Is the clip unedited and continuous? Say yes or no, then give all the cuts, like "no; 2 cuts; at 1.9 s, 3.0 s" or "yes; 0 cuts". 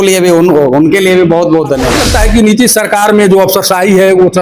no; 1 cut; at 2.0 s